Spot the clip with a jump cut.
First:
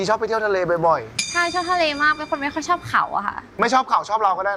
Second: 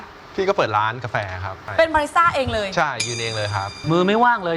second; 2 cuts; at 1.6 s, 3.7 s

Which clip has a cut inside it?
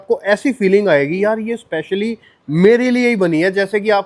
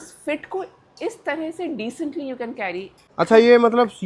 second; 1 cut; at 3.0 s

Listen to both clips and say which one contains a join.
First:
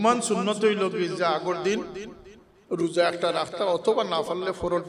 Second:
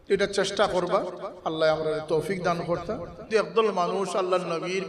second; 1 cut; at 3.2 s

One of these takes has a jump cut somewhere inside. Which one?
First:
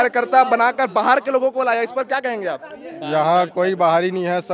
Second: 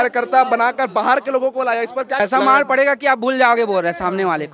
second; 1 cut; at 2.2 s

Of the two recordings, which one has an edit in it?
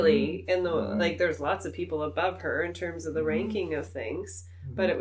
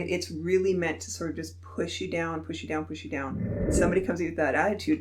second; 1 cut; at 3.7 s

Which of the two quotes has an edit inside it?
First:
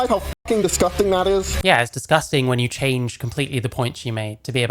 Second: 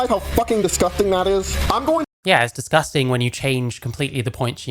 first; 1 cut; at 1.5 s

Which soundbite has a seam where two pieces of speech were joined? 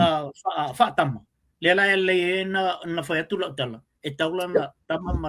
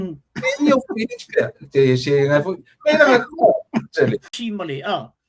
second; 1 cut; at 4.3 s

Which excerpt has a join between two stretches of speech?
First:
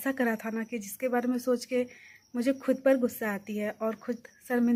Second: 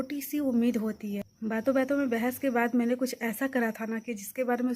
second; 1 cut; at 1.2 s

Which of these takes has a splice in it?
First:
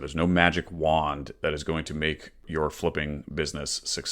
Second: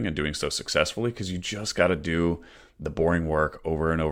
first; 1 cut; at 2.5 s

